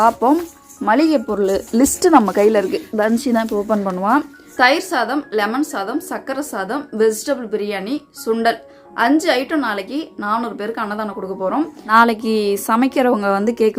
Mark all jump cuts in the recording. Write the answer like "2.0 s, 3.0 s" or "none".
4.5 s, 11.8 s